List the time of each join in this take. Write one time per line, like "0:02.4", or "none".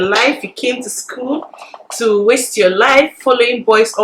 none